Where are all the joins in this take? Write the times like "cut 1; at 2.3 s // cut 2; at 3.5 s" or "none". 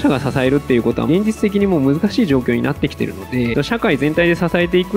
cut 1; at 1.1 s // cut 2; at 3.5 s